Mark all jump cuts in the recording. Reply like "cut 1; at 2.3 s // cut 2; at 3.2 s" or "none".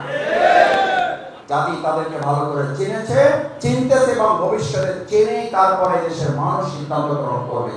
cut 1; at 1.3 s